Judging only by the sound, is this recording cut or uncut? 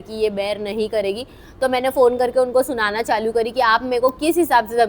uncut